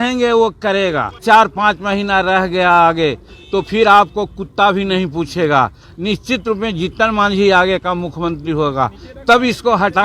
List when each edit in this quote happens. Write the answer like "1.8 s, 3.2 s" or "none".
1.2 s